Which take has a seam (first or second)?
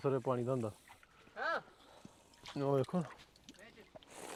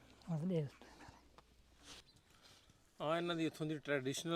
second